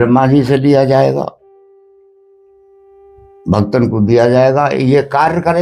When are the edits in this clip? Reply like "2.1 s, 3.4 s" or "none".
none